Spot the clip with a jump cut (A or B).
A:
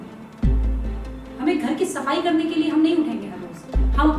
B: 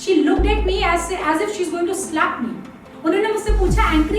B